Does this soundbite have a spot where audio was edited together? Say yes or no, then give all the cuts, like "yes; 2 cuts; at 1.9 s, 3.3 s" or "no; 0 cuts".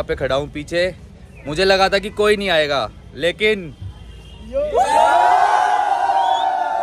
no; 0 cuts